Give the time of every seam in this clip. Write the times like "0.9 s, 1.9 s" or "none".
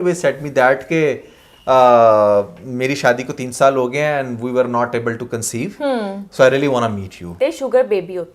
7.4 s